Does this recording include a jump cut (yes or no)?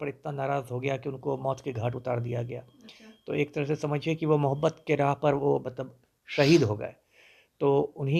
no